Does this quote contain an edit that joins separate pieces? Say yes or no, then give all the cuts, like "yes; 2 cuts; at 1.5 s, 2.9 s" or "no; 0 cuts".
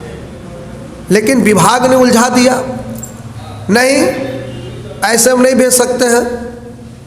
no; 0 cuts